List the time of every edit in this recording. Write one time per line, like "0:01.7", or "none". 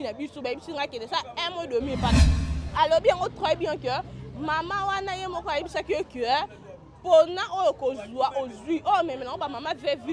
0:01.8